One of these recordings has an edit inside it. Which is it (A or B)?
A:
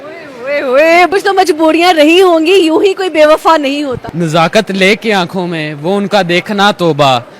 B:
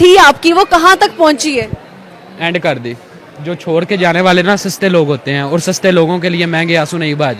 A